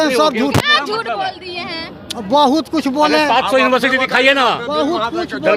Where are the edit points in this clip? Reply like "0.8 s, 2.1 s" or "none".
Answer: none